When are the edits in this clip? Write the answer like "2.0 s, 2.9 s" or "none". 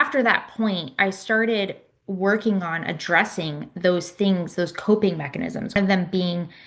5.8 s